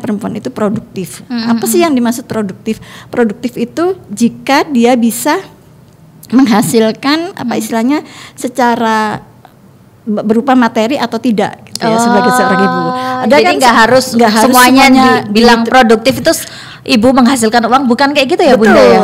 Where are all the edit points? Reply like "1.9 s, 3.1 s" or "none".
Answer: none